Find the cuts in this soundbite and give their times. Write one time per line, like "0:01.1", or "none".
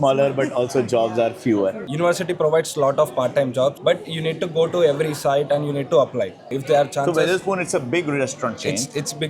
0:01.9
0:06.5